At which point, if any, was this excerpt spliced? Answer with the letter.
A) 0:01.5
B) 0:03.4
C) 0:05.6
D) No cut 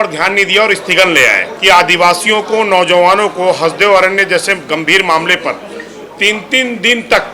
A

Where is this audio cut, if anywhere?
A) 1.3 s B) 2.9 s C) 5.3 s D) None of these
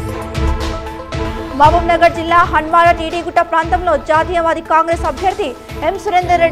A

